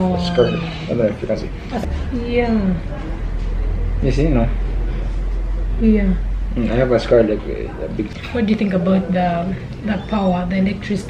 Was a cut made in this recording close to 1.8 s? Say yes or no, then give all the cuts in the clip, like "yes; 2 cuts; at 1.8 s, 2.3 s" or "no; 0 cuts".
yes; 2 cuts; at 1.8 s, 8.2 s